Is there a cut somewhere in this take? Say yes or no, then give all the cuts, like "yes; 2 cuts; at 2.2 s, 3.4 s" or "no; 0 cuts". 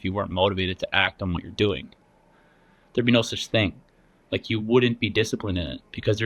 no; 0 cuts